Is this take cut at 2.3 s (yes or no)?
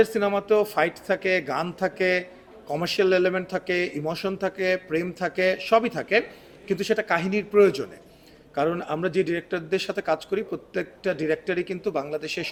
no